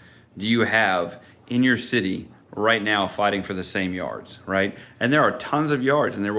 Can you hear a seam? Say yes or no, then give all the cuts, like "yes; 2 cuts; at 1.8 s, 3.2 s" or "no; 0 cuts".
no; 0 cuts